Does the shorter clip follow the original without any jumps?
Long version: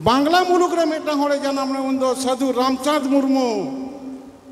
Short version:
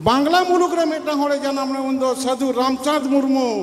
yes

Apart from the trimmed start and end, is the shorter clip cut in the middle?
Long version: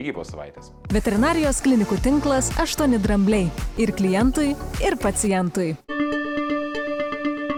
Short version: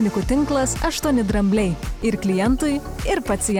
no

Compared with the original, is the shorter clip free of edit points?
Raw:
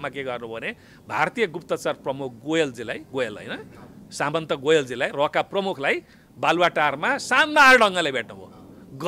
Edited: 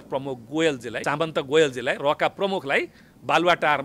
no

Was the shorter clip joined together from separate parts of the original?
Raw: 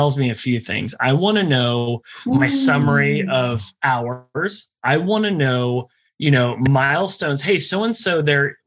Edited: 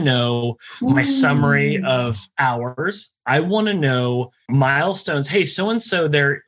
yes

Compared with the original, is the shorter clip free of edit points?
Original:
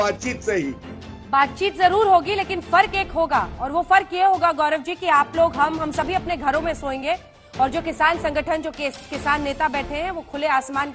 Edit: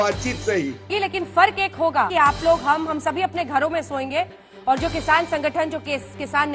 no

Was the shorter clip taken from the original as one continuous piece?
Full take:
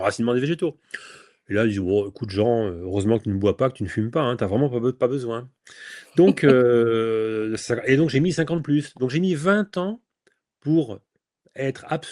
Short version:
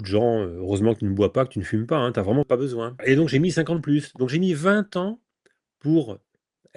no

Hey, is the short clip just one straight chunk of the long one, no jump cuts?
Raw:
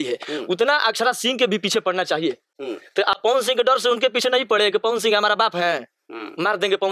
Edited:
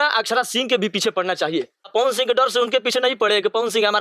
no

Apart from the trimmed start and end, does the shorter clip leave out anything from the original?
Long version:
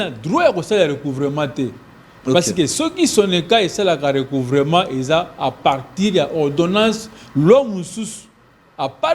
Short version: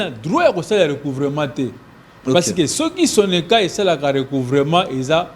no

